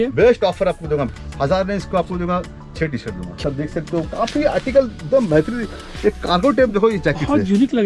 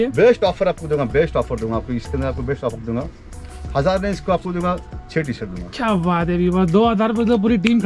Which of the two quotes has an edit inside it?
first; 2 cuts; at 1.1 s, 2.8 s

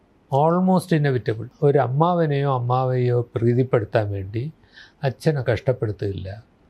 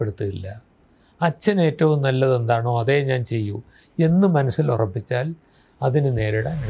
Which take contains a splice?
first; 1 cut; at 1.5 s

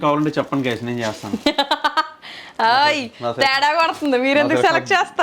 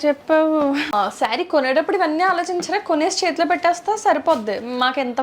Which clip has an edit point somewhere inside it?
second; 1 cut; at 0.9 s

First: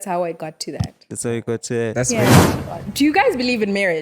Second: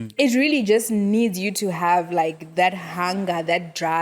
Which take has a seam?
first; 1 cut; at 2.4 s

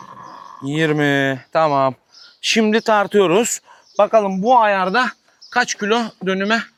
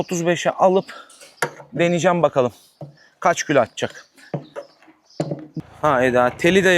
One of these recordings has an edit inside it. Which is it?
second; 1 cut; at 5.6 s

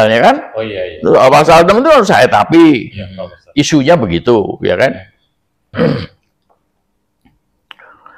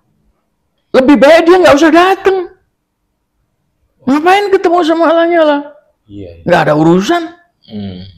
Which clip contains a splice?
first; 1 cut; at 5.7 s

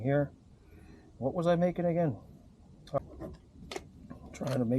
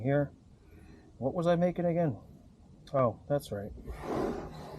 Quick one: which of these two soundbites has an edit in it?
first; 1 cut; at 3.0 s

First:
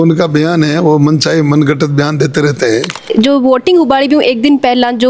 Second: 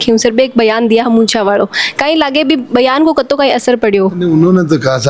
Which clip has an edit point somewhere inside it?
first; 1 cut; at 2.9 s

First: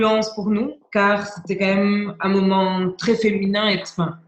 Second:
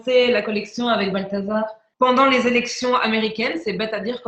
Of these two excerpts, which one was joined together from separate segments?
second; 1 cut; at 1.8 s

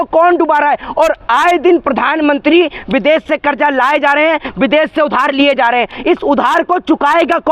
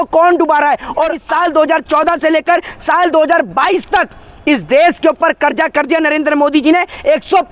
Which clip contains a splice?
second; 1 cut; at 1.2 s

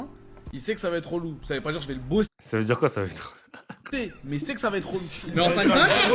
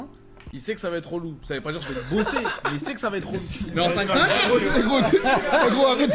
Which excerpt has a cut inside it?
second; 1 cut; at 2.3 s

